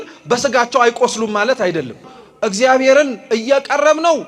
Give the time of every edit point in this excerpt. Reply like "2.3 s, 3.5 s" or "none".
2.0 s